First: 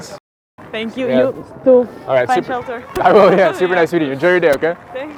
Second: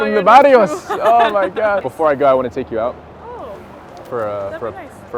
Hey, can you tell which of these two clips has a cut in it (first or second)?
second